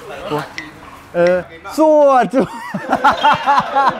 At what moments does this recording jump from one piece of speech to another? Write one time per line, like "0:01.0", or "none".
0:01.6